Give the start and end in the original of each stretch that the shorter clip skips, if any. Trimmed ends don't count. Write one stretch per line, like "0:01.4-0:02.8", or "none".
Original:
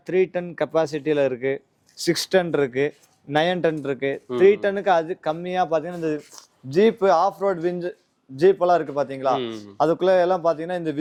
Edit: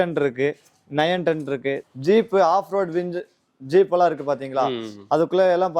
0:04.2-0:06.5